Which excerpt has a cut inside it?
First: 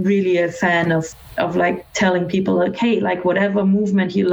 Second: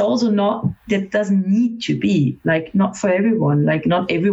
first; 1 cut; at 1.2 s

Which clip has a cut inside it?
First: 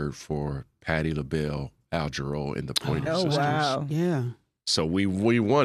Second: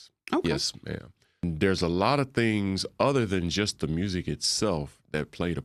second; 1 cut; at 1.4 s

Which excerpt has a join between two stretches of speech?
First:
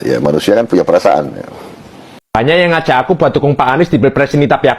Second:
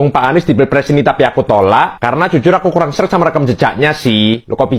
first; 1 cut; at 2.3 s

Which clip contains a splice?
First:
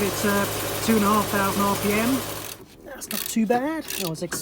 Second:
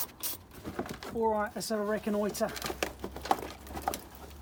first; 1 cut; at 2.4 s

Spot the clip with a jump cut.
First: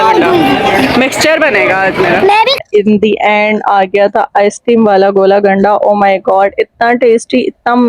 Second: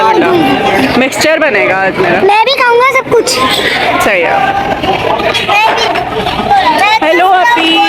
first; 1 cut; at 2.6 s

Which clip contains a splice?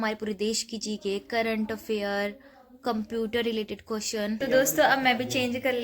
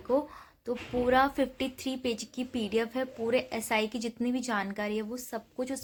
first; 1 cut; at 4.4 s

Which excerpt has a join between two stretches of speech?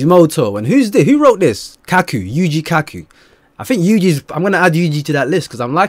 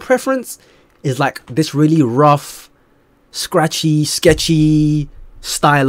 first; 1 cut; at 1.7 s

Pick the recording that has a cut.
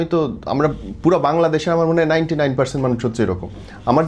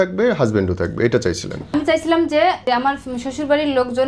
second; 2 cuts; at 1.7 s, 2.6 s

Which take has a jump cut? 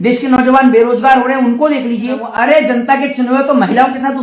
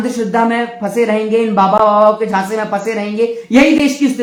first; 1 cut; at 2.3 s

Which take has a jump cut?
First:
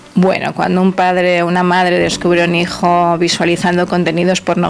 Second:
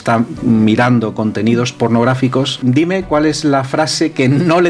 second; 1 cut; at 2.6 s

